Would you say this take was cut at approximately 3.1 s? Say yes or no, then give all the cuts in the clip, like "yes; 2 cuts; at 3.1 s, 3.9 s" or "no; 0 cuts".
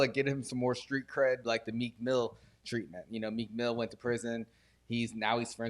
no; 1 cut; at 1.4 s